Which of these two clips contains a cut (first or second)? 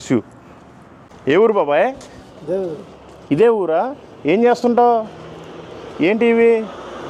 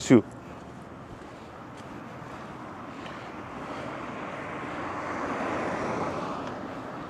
first